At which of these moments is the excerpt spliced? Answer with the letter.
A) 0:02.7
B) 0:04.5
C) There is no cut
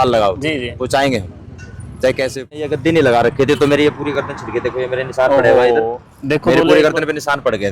A